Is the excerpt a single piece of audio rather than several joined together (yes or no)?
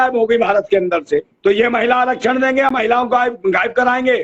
no